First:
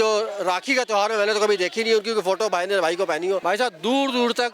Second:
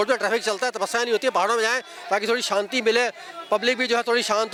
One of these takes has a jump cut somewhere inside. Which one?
first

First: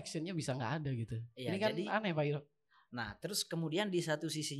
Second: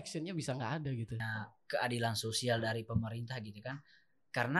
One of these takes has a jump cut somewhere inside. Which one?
second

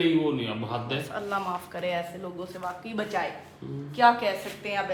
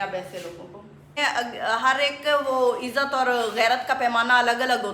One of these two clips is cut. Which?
second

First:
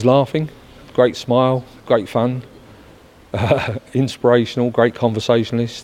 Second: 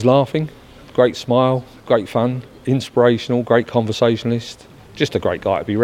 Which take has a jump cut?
second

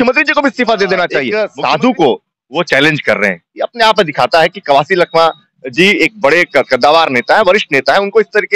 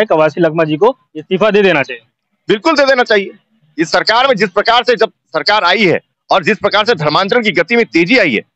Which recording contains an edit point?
first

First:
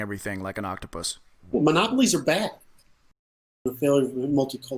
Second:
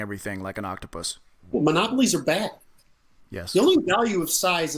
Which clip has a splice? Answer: first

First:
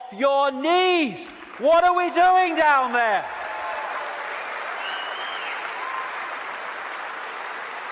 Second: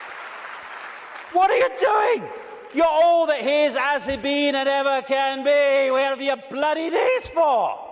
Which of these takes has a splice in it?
second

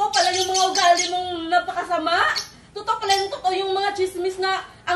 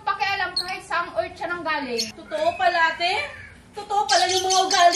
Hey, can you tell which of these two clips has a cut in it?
second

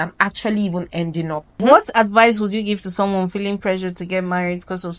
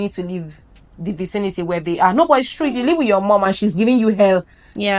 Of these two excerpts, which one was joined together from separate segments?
first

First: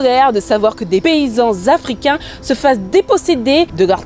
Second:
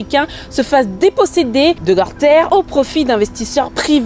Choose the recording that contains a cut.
first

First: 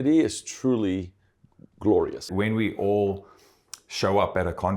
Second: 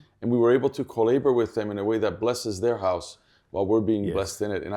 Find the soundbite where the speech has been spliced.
first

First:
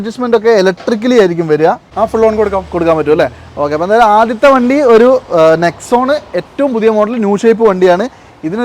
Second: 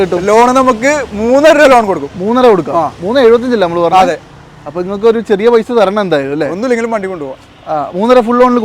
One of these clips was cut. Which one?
first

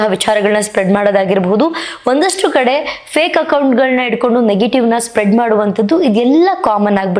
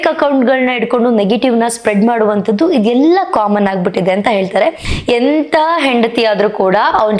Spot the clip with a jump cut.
second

